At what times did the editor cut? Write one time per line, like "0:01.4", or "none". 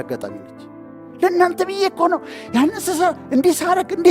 0:01.0